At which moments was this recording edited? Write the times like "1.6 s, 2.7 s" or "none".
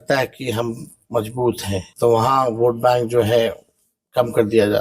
1.9 s